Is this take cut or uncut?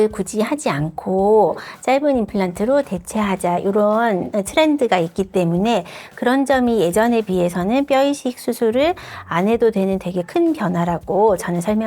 uncut